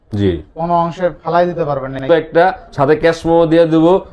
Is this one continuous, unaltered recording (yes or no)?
no